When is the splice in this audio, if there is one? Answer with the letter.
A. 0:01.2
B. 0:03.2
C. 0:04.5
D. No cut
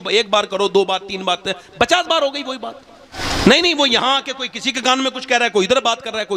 B